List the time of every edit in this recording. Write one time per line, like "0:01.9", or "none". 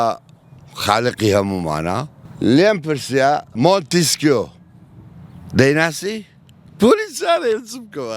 0:02.2
0:03.5